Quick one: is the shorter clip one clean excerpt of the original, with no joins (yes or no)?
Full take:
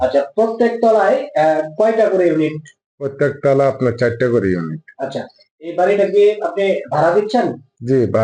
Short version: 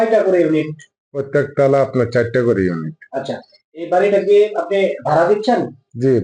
yes